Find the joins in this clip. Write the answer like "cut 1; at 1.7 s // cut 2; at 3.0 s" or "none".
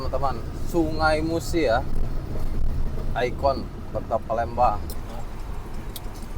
cut 1; at 4.9 s